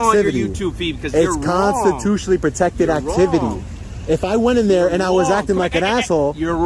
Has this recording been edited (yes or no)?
no